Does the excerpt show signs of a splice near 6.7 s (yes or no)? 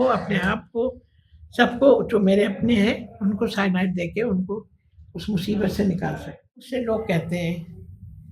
yes